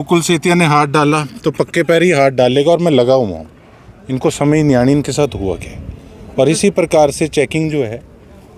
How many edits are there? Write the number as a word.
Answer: zero